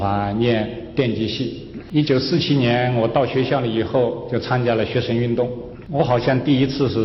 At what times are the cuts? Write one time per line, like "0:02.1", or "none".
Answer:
0:01.7
0:05.7